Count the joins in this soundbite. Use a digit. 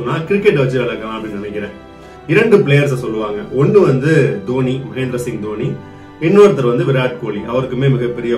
1